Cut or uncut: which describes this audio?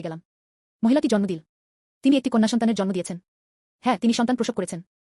uncut